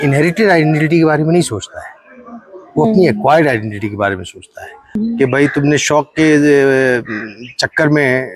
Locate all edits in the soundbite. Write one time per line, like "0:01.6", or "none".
0:05.0